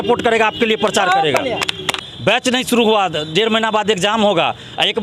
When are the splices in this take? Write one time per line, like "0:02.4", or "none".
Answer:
0:02.0